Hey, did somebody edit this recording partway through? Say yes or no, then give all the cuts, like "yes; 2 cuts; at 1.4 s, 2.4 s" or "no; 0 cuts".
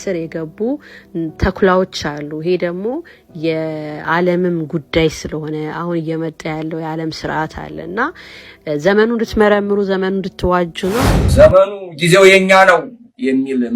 yes; 1 cut; at 11.1 s